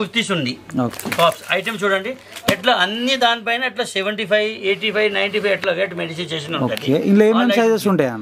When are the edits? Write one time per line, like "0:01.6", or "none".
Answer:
none